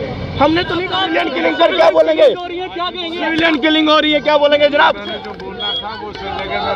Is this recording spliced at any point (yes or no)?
yes